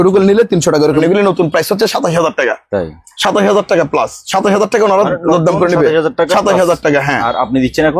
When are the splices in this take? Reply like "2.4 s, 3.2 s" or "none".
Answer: 0.9 s